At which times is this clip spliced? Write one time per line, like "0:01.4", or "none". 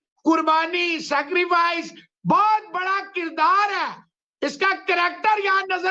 none